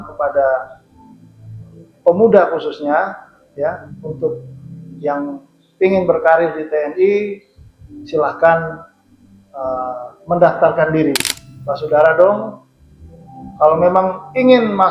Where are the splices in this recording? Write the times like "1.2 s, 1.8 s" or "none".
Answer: 11.3 s

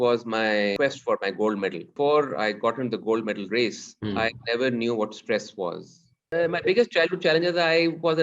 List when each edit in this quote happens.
0.7 s, 1.9 s, 3.9 s, 6.3 s

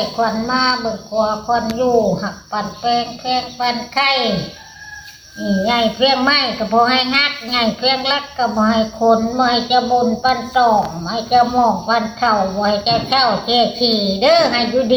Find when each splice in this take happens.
none

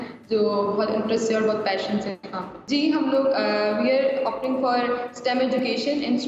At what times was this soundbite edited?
2.5 s

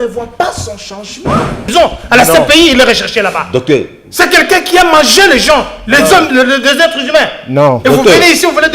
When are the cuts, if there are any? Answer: 1.7 s

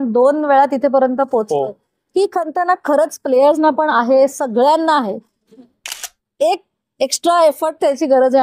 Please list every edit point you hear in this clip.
none

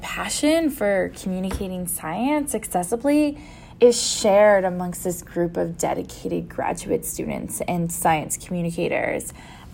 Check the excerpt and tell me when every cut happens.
none

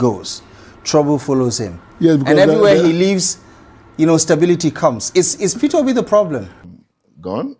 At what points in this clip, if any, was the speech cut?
6.6 s

